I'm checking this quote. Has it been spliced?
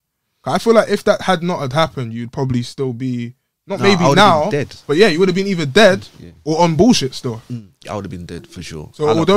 no; 0 cuts

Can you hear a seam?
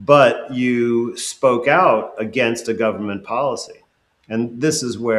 no; 0 cuts

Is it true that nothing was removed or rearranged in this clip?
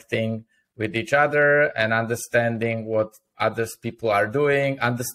yes; 0 cuts

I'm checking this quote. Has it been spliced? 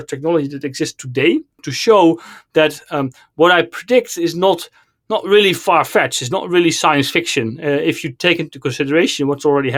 no; 0 cuts

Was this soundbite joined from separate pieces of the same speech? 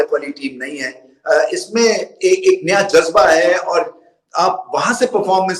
no; 0 cuts

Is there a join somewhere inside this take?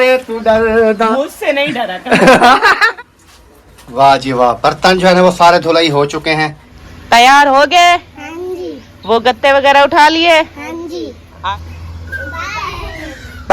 yes; 3 cuts; at 2.9 s, 6.7 s, 11.4 s

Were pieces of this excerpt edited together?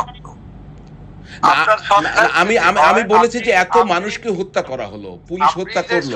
no; 0 cuts

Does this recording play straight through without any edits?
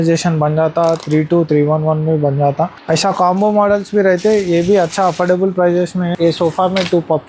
no; 2 cuts; at 2.8 s, 6.1 s

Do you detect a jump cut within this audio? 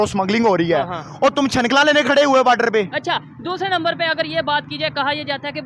no; 0 cuts

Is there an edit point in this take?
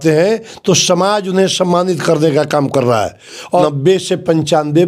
yes; 1 cut; at 3.6 s

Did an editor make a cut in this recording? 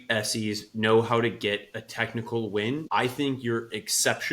yes; 1 cut; at 2.9 s

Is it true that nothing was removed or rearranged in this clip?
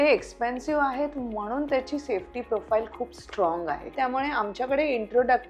no; 1 cut; at 3.9 s

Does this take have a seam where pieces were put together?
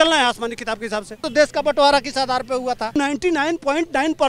yes; 2 cuts; at 1.2 s, 2.9 s

